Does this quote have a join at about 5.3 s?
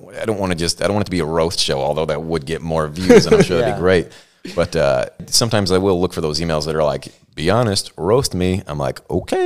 yes; 1 cut; at 5.3 s

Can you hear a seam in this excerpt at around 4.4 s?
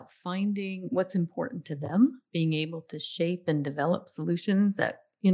no; 2 cuts; at 0.8 s, 2.2 s

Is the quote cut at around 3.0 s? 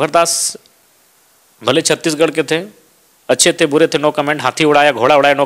no; 0 cuts

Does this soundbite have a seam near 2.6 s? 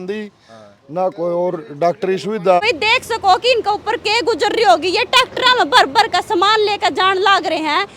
yes; 1 cut; at 2.6 s

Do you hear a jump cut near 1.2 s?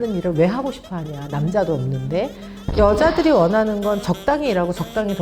no; 1 cut; at 2.6 s

